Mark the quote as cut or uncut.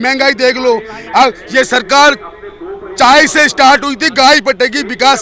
uncut